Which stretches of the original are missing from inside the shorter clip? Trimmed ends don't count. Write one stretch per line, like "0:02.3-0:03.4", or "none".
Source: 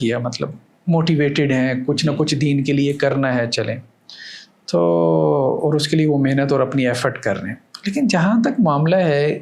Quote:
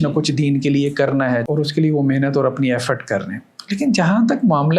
0:03.5-0:05.6